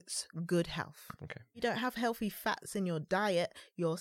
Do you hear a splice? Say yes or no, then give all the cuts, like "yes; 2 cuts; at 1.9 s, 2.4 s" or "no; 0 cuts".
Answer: yes; 1 cut; at 1.6 s